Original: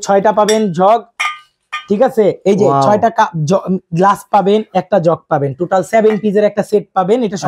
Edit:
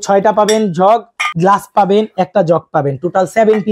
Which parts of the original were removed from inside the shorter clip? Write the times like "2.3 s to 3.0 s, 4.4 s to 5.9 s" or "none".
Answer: 1.3 s to 3.8 s